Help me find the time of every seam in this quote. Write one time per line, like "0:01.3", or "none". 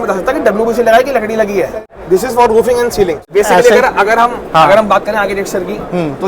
0:01.8
0:03.3